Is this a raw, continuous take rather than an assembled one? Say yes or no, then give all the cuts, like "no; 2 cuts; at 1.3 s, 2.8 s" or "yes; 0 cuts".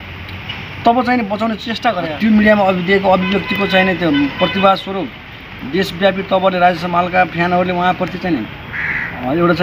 no; 1 cut; at 2.1 s